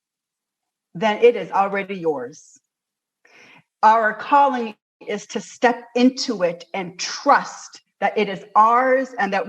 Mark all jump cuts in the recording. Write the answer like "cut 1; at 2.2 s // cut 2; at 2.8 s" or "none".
cut 1; at 3.6 s